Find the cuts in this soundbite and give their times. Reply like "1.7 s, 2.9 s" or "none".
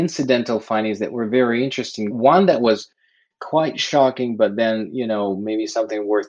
2.1 s

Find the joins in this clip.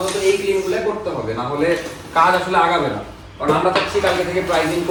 none

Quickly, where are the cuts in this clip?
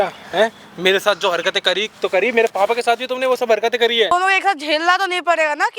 4.1 s

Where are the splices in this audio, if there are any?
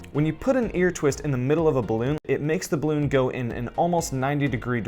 2.2 s

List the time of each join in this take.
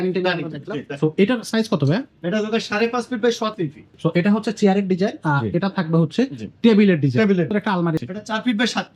3.8 s, 7.8 s

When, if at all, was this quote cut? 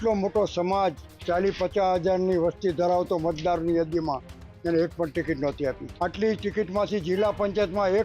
5.9 s

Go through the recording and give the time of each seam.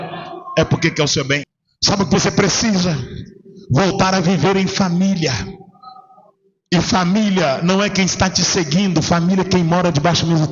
1.4 s

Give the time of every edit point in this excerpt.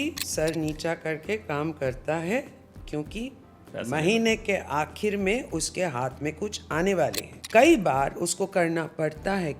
7.3 s

